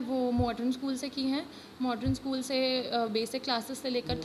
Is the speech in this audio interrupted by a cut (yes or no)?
no